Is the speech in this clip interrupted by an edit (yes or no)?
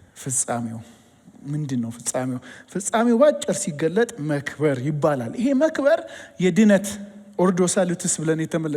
no